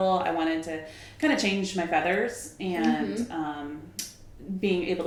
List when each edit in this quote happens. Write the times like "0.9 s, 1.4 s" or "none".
none